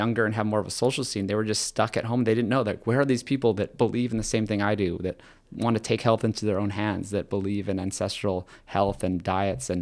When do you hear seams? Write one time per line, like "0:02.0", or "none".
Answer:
none